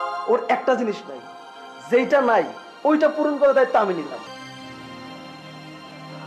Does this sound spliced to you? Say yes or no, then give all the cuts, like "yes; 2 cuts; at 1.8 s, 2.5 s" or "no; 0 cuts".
yes; 1 cut; at 4.3 s